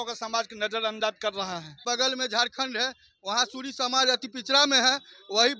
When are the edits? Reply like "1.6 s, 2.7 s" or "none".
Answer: 1.8 s